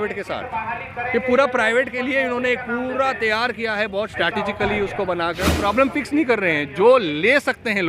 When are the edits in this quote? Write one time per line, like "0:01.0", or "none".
0:05.6